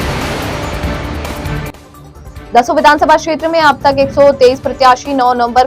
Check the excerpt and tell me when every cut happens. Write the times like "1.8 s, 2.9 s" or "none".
1.9 s

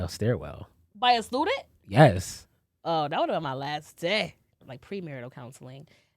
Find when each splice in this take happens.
4.7 s

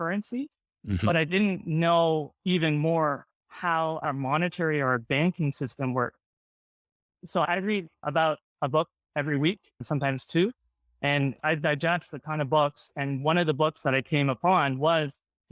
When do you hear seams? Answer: 4.0 s, 7.4 s, 11.4 s

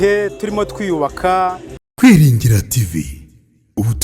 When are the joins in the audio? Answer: 1.8 s

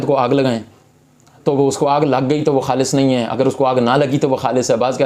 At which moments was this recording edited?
none

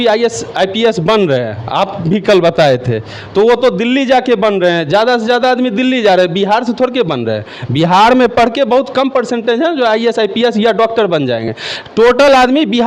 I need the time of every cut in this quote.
none

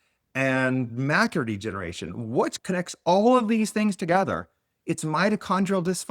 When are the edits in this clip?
2.6 s

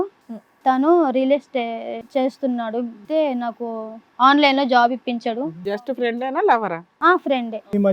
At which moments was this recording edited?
2.0 s, 3.0 s, 5.7 s

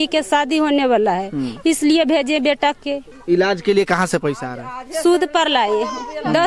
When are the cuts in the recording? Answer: 3.1 s

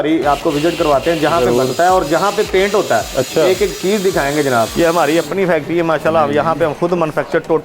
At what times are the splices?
4.7 s

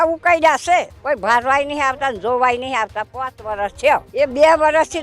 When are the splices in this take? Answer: 0.9 s, 4.1 s

